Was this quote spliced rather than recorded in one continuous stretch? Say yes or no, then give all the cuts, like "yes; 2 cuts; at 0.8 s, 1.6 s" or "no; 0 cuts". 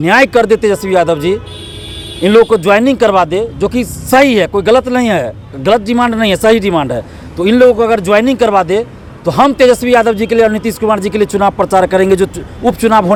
no; 0 cuts